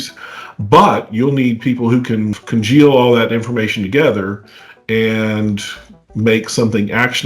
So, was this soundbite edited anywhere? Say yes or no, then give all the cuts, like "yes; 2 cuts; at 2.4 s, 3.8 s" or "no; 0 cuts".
yes; 1 cut; at 2.4 s